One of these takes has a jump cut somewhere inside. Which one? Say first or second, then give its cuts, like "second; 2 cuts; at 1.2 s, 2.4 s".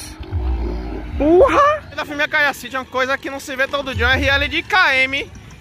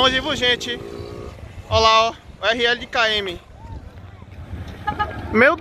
first; 1 cut; at 1.9 s